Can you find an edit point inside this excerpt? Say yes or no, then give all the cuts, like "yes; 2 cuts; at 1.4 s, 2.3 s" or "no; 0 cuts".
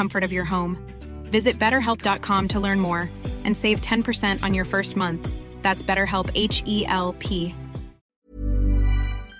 yes; 1 cut; at 8.2 s